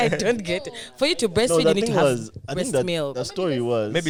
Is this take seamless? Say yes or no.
yes